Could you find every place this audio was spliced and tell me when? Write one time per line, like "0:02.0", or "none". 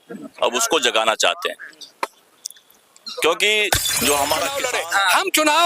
0:04.6

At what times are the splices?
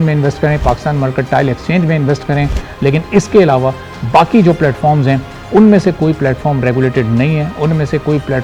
none

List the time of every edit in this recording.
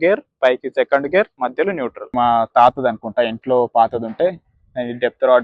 0:02.1

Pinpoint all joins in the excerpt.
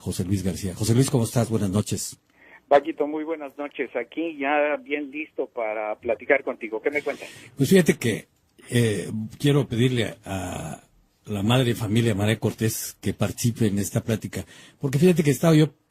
0:08.4

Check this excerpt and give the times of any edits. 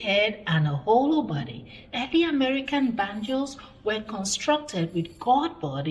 none

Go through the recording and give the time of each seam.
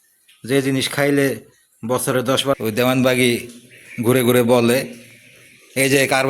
0:02.5

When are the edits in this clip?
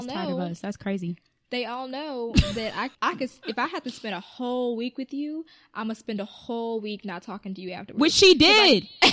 0:03.0

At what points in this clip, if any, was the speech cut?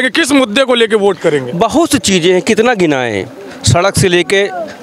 none

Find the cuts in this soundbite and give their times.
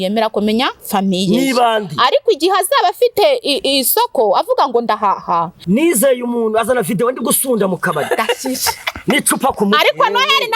0:05.5

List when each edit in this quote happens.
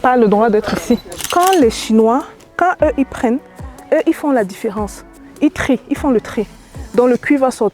0:01.3

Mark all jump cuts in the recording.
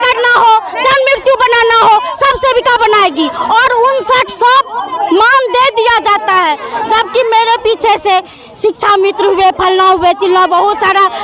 none

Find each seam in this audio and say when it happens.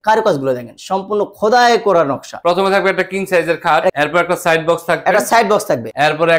0:02.4
0:03.9

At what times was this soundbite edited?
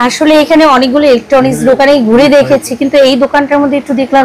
none

